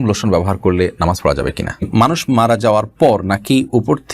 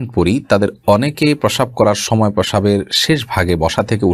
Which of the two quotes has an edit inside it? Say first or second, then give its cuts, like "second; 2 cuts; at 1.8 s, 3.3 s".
first; 1 cut; at 1.9 s